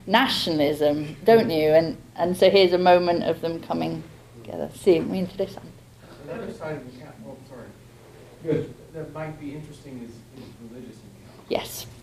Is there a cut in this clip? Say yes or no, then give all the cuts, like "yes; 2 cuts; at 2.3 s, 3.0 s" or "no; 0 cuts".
yes; 1 cut; at 3.1 s